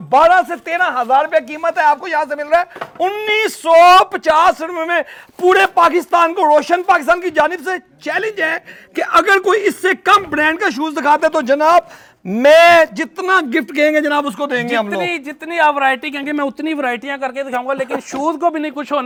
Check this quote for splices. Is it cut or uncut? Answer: uncut